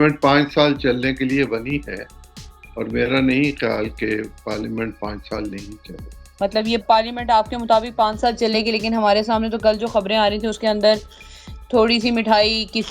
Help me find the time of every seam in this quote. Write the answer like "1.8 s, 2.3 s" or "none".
none